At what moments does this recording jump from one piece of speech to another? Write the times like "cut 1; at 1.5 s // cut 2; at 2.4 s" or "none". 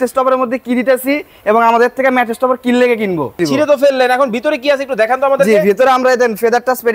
cut 1; at 3.4 s